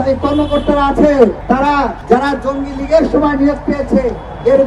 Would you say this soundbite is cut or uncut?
cut